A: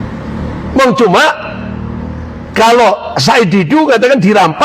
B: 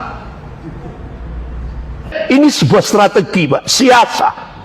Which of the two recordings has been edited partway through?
B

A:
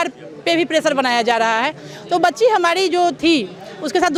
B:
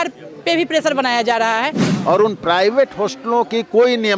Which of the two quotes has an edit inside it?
B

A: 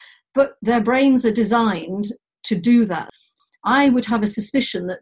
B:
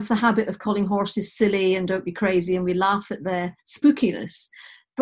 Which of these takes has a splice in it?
A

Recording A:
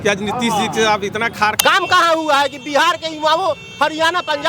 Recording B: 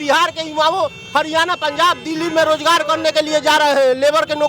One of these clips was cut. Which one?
A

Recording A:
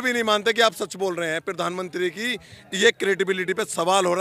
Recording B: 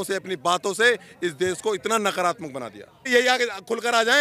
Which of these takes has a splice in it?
B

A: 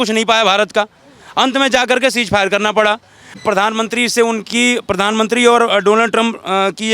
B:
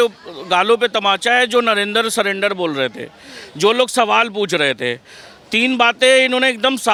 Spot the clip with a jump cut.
A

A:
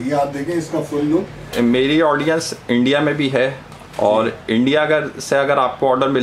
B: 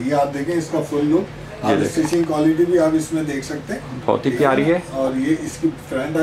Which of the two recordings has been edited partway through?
A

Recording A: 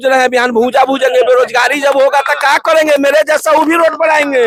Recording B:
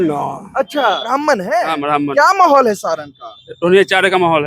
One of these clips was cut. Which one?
B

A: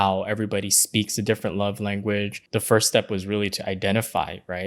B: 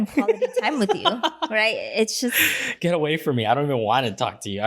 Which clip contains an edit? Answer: A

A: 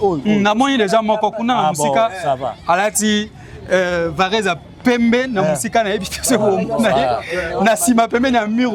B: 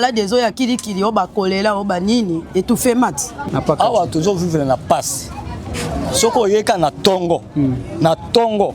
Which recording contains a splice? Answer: B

